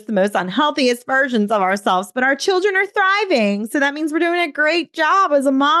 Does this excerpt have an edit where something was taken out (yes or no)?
no